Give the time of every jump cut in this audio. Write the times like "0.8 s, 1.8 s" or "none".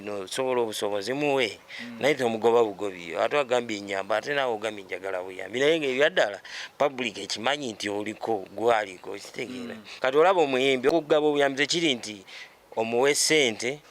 9.8 s, 10.9 s